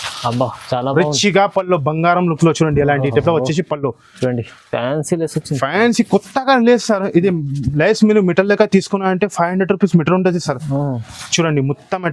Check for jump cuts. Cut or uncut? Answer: uncut